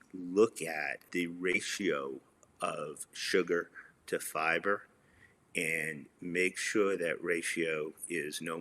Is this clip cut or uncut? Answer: cut